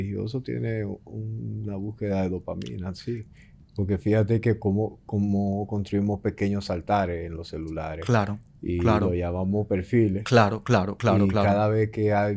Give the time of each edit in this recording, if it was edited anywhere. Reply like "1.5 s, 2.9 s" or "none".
none

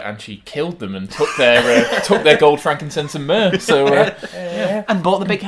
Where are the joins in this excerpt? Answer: none

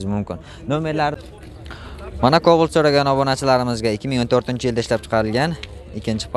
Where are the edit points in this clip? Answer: 1.2 s

